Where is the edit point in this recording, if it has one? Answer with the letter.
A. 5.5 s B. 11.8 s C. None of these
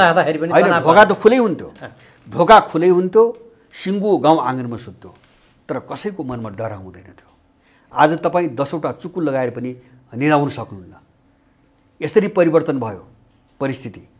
C